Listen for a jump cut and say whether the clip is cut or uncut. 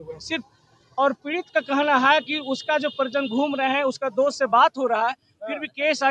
uncut